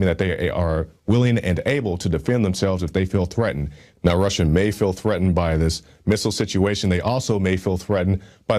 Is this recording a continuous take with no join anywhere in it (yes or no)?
yes